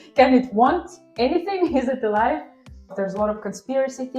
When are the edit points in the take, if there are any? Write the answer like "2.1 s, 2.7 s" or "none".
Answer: 2.9 s